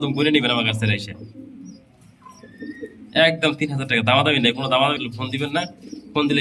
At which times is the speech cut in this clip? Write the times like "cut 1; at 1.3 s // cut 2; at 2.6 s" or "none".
none